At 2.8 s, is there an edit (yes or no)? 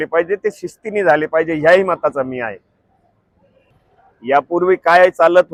no